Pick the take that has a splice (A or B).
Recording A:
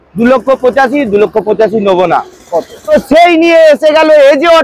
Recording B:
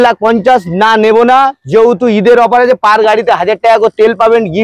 A